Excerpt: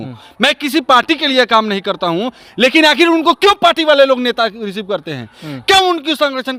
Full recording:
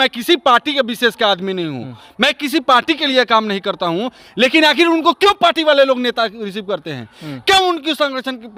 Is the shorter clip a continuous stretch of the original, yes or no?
yes